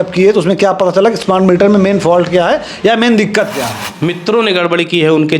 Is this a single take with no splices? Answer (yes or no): no